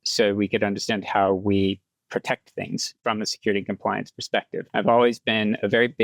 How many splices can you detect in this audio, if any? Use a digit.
2